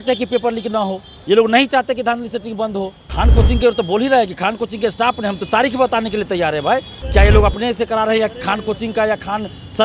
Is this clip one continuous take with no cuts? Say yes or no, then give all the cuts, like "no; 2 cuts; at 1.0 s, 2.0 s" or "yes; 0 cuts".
no; 2 cuts; at 3.0 s, 7.0 s